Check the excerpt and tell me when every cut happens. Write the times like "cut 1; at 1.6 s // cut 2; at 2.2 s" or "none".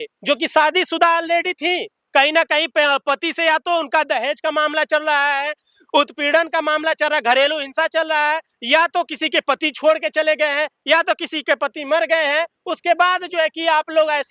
none

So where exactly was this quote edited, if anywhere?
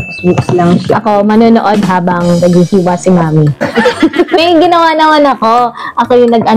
none

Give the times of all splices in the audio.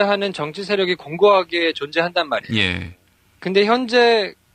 cut 1; at 1.2 s

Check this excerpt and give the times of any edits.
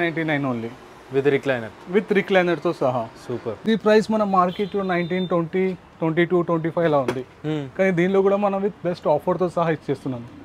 cut 1; at 3.7 s

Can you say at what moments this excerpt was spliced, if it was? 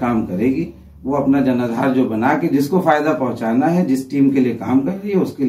none

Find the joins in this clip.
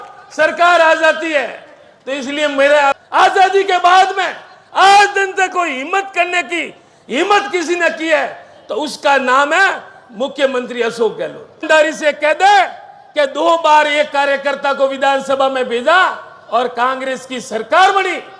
cut 1; at 2.9 s // cut 2; at 11.6 s

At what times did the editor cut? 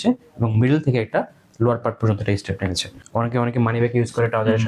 cut 1; at 2.9 s

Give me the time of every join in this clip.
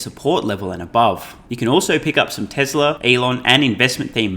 cut 1; at 1.4 s // cut 2; at 3.0 s

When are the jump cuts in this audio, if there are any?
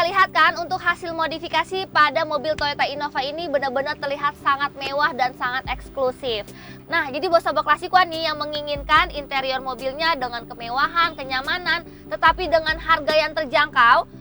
cut 1; at 6.7 s

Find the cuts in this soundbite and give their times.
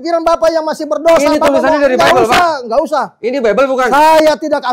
none

